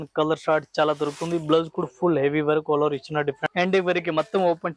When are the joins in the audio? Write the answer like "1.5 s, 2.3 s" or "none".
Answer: 3.4 s